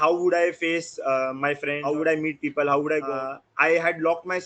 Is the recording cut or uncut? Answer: cut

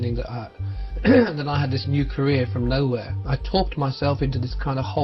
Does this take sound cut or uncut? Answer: cut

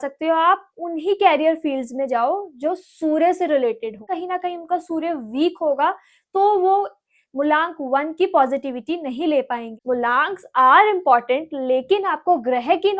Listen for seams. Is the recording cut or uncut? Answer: cut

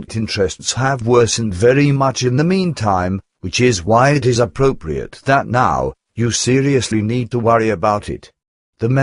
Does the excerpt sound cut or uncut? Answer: cut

